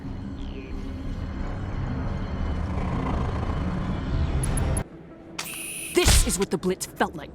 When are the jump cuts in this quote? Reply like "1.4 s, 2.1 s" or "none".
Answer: 4.8 s